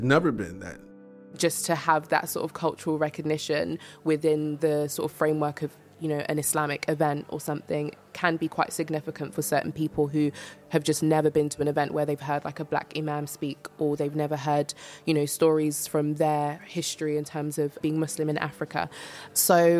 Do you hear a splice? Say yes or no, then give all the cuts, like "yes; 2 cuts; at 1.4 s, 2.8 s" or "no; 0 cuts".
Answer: yes; 2 cuts; at 1.1 s, 4.5 s